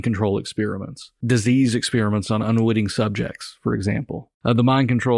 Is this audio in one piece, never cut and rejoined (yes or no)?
no